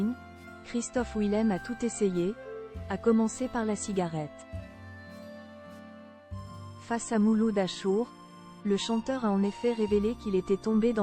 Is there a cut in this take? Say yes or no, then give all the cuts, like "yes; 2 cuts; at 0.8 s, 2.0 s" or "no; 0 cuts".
yes; 2 cuts; at 4.3 s, 6.9 s